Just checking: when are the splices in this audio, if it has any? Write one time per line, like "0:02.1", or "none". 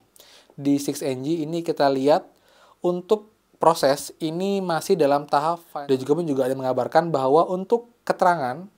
0:05.6